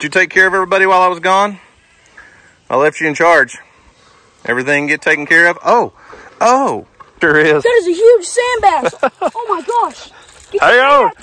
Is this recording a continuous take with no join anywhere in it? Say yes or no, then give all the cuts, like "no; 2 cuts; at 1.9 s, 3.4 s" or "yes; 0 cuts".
no; 1 cut; at 7.1 s